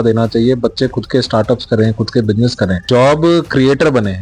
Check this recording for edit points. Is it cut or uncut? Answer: cut